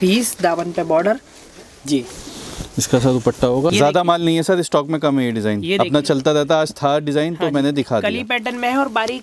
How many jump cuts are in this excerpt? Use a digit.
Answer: 1